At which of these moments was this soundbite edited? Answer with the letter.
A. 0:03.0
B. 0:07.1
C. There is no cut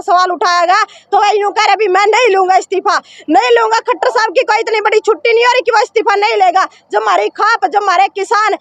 C